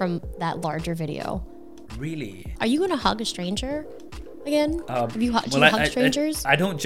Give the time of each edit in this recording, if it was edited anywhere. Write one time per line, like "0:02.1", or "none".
0:02.1